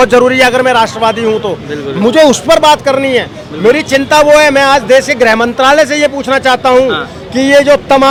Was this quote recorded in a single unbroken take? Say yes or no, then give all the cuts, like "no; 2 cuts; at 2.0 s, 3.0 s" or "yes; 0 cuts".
yes; 0 cuts